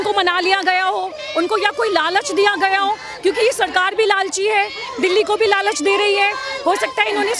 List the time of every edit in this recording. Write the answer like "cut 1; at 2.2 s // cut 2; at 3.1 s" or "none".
none